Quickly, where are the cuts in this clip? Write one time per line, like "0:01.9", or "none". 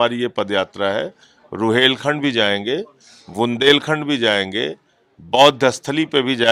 none